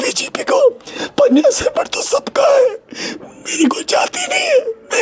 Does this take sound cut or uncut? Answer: uncut